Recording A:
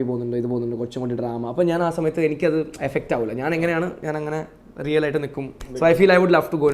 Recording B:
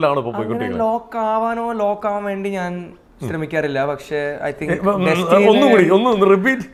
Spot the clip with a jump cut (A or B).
A